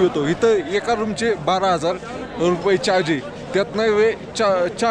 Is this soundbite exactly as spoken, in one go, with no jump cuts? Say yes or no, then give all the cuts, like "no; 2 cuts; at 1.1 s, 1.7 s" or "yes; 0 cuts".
yes; 0 cuts